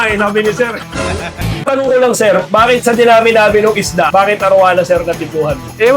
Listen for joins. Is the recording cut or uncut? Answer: cut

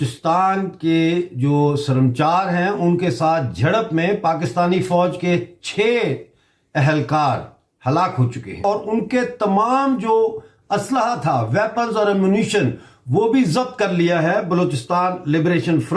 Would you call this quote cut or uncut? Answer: uncut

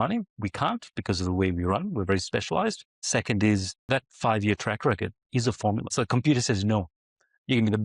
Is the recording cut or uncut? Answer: cut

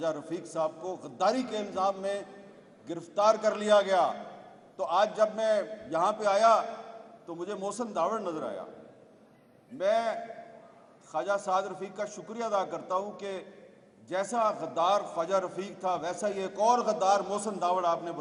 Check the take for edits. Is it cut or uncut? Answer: uncut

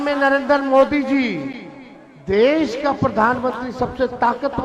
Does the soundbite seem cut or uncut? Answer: uncut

